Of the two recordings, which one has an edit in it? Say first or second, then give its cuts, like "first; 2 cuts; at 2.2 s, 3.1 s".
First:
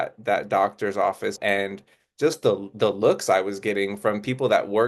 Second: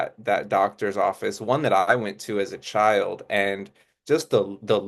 first; 1 cut; at 1.4 s